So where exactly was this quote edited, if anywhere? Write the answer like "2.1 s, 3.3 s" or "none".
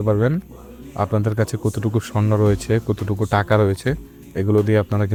none